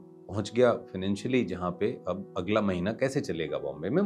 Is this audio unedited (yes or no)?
yes